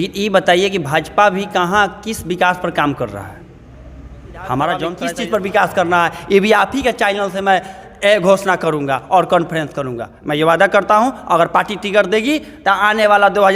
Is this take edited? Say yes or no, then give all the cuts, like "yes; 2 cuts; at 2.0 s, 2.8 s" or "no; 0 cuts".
yes; 1 cut; at 5.0 s